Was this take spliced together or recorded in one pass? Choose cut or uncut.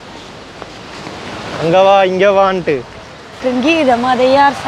cut